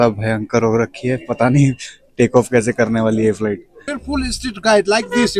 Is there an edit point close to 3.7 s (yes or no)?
yes